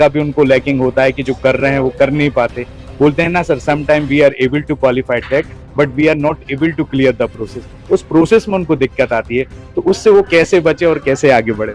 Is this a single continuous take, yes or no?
yes